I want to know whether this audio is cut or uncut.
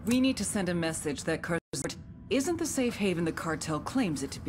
cut